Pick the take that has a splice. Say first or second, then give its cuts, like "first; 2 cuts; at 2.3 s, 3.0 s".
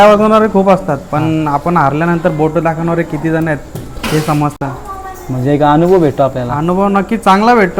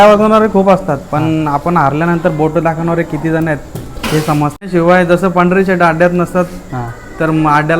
second; 1 cut; at 4.7 s